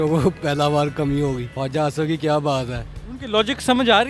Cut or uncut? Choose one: uncut